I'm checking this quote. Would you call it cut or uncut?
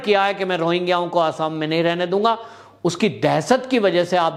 uncut